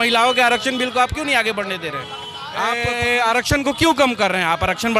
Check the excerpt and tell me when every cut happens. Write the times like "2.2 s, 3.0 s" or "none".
2.7 s